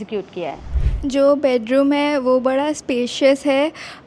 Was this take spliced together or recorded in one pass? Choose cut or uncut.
cut